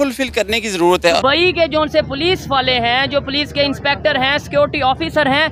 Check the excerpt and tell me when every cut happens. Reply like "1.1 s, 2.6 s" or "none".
1.2 s